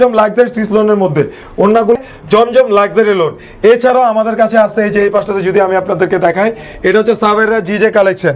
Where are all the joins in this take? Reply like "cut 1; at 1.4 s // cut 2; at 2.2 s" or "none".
cut 1; at 2.0 s